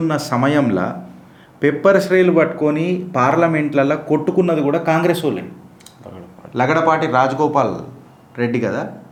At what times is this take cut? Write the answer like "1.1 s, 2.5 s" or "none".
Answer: none